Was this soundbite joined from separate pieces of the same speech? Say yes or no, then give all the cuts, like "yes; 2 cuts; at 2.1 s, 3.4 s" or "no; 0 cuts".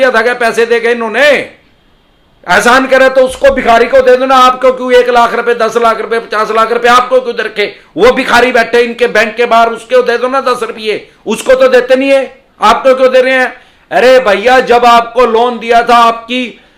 no; 0 cuts